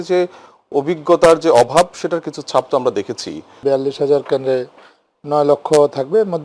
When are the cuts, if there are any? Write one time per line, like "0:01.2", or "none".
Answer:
0:03.5